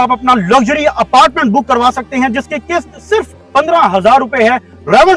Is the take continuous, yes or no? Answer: yes